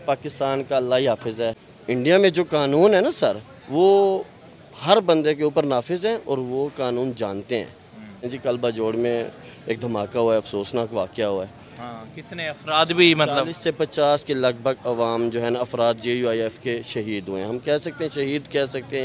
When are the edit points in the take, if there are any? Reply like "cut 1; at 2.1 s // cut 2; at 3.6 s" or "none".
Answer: cut 1; at 1.7 s // cut 2; at 8.3 s